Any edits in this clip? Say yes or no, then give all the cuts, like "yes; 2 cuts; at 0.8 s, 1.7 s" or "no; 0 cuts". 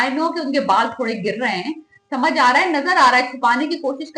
no; 0 cuts